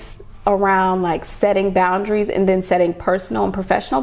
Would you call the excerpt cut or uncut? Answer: uncut